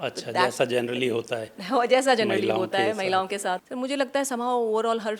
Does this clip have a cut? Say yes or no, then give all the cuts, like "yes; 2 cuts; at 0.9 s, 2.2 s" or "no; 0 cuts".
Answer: yes; 1 cut; at 3.7 s